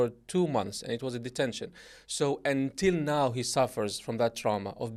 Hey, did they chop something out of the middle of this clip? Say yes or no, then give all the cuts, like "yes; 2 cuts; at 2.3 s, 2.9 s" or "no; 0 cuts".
no; 0 cuts